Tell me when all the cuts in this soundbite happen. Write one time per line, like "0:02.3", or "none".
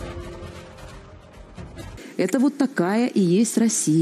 0:02.0